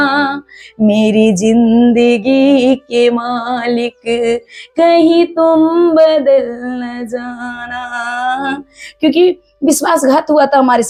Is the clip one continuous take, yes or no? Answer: yes